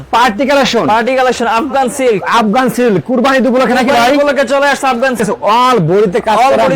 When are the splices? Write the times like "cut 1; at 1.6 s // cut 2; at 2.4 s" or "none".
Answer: cut 1; at 5.2 s